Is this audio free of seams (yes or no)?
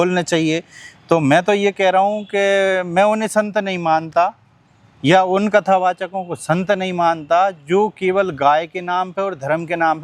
yes